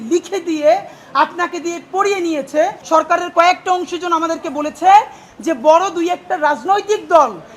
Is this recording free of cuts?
no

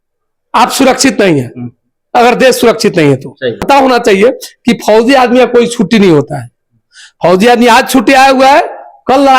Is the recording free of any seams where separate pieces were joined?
no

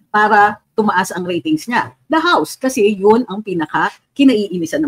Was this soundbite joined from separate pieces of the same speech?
no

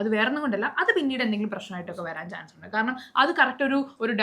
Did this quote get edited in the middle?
no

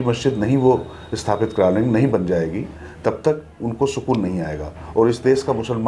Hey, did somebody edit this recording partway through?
no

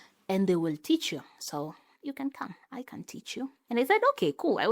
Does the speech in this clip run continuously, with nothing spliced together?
no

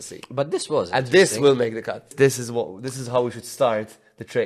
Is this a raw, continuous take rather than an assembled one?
no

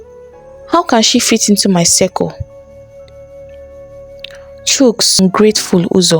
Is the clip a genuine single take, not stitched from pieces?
no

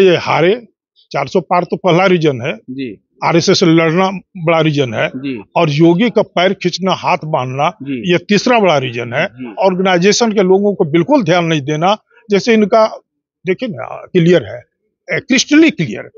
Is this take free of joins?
yes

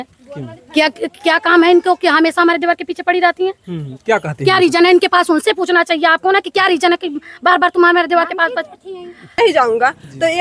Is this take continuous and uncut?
no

